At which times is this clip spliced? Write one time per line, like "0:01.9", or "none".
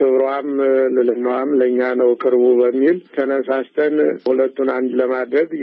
0:04.3